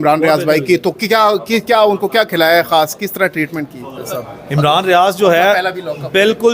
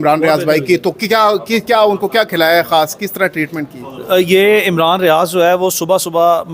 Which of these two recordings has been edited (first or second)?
first